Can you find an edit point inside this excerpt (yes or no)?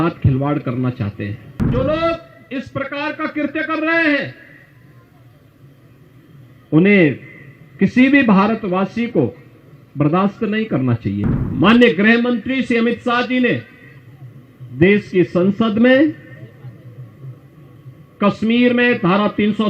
yes